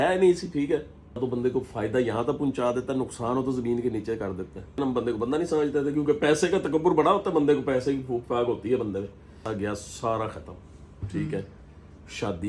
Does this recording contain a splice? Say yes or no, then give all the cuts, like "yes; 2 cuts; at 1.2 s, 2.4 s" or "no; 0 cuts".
yes; 3 cuts; at 1.2 s, 4.8 s, 9.4 s